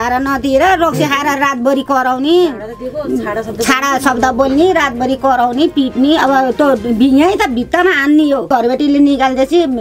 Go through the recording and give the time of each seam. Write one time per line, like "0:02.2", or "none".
0:08.5

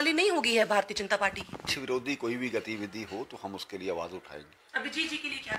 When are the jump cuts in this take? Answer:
0:01.7

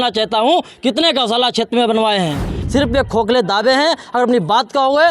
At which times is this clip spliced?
0:02.6

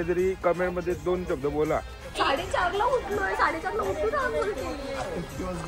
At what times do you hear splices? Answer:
0:02.0

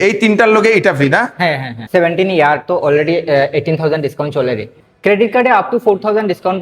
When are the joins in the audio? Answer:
0:01.8
0:04.8

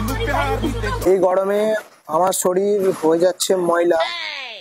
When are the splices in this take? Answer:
0:01.1

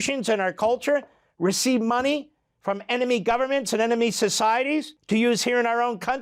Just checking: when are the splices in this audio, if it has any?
0:04.9

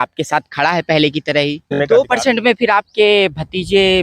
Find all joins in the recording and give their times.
0:01.8

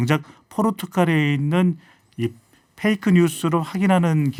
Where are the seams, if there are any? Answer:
none

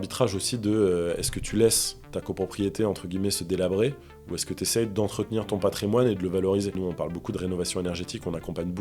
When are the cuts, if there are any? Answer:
0:06.7

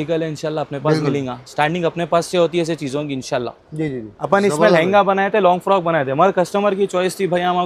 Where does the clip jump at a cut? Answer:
0:04.1

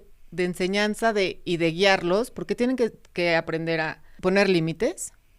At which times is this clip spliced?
0:04.0

